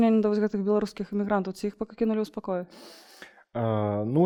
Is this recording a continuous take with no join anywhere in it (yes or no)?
yes